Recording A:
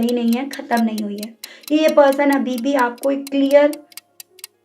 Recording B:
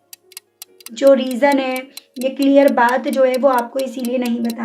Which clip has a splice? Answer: A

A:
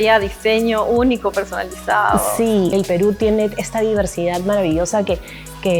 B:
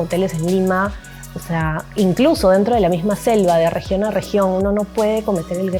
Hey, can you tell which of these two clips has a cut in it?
A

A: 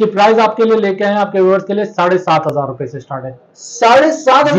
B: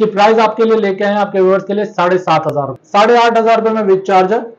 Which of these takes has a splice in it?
B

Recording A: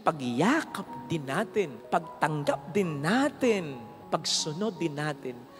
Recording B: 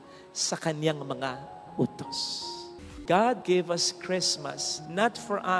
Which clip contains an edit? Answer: B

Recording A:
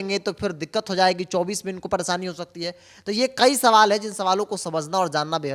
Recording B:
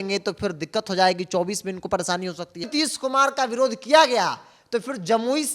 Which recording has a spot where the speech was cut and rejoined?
B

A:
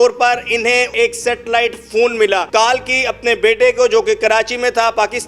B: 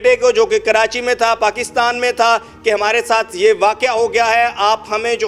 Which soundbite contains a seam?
A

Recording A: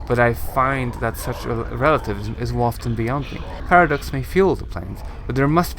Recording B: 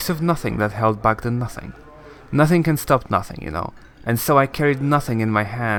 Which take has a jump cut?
A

